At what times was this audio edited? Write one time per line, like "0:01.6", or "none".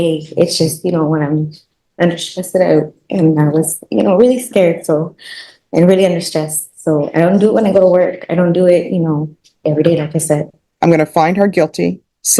0:10.5